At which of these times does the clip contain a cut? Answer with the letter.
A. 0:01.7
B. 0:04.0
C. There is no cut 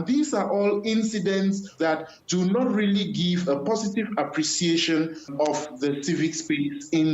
A